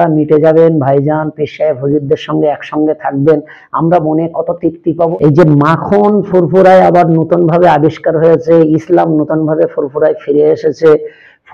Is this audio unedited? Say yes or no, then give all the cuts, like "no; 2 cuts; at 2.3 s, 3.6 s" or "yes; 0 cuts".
no; 1 cut; at 5.1 s